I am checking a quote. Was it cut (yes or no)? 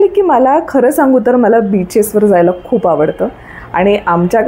no